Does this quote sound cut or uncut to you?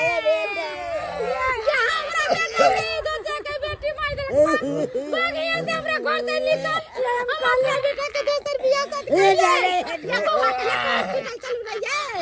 uncut